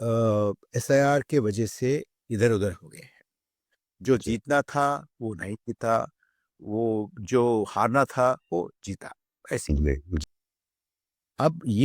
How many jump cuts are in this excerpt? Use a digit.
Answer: 1